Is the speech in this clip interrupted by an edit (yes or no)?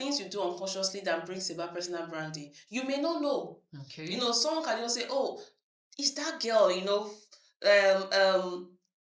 no